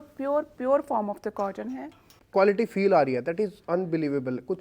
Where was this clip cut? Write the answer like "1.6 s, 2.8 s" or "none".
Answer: 2.2 s